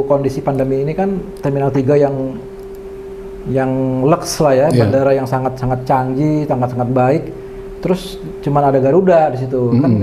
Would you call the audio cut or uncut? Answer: uncut